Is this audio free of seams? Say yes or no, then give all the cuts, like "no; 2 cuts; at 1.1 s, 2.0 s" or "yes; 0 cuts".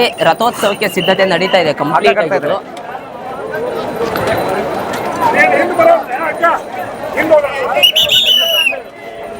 yes; 0 cuts